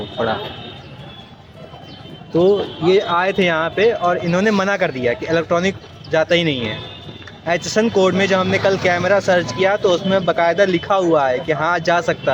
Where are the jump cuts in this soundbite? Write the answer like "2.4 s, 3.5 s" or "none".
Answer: none